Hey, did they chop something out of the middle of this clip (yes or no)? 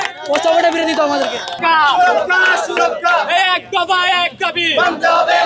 yes